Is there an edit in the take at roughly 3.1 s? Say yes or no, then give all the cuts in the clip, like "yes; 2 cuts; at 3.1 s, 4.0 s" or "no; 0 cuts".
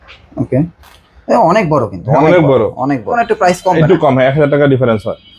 yes; 1 cut; at 3.1 s